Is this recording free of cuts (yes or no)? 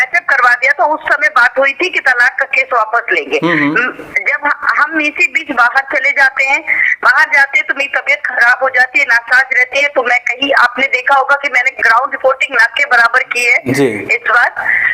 yes